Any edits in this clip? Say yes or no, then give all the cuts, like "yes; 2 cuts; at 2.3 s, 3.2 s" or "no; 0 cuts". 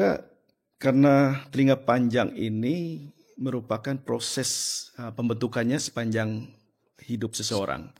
no; 0 cuts